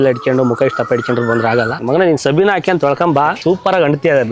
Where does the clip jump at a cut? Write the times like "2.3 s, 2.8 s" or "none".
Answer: 1.8 s, 3.4 s